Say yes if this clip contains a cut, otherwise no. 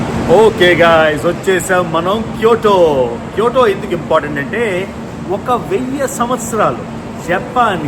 no